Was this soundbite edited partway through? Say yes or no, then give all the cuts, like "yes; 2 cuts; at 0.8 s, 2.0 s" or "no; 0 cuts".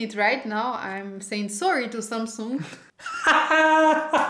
yes; 1 cut; at 3.1 s